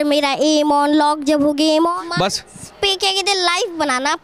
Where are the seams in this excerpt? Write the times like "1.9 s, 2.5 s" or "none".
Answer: 2.0 s